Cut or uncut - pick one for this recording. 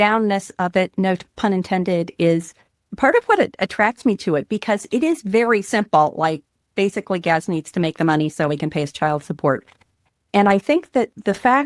uncut